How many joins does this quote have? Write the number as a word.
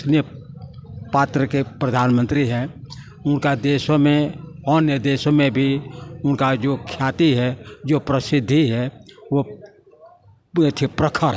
zero